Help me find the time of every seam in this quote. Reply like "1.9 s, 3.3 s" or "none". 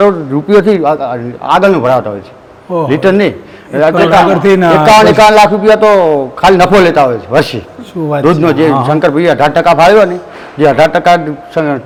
none